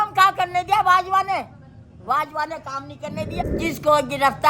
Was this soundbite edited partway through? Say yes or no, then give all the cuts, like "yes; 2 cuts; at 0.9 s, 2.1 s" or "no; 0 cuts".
yes; 1 cut; at 3.4 s